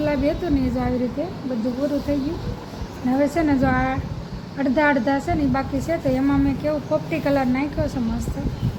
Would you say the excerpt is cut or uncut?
uncut